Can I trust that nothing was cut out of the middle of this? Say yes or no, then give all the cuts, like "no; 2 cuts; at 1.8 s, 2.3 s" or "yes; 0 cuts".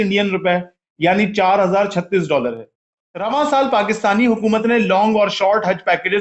no; 1 cut; at 3.0 s